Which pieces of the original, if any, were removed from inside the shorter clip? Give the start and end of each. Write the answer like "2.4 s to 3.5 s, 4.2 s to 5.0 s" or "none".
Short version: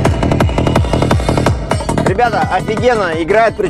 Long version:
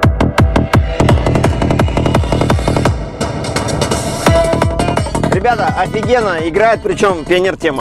3.1 s to 4.9 s